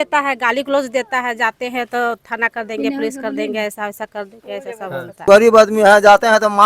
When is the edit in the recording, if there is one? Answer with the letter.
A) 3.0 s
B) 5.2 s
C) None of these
B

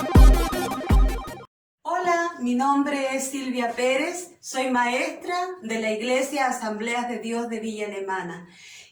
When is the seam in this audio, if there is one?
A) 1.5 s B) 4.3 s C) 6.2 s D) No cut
A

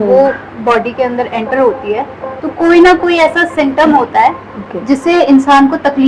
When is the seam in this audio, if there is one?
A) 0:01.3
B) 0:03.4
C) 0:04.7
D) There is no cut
D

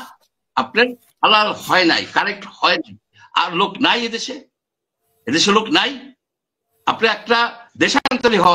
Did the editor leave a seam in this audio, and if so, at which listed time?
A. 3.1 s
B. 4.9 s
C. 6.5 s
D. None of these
A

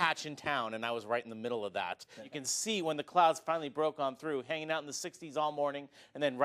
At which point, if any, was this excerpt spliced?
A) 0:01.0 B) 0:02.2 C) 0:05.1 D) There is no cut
B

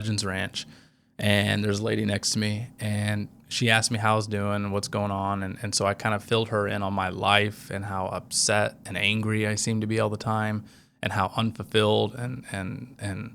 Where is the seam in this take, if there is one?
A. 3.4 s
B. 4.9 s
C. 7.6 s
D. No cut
A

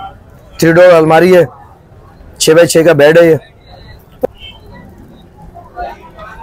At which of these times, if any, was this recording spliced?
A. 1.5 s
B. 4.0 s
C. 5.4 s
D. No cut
B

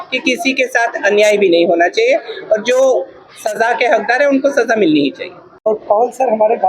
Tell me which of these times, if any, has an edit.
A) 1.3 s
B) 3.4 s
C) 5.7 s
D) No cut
C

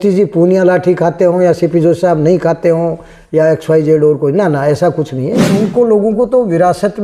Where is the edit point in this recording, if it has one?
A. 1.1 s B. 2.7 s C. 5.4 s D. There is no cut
C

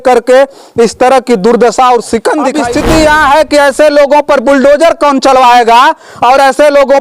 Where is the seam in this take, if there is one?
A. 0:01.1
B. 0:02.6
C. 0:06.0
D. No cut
B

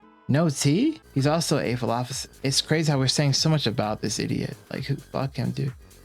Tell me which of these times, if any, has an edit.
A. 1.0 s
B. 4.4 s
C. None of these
A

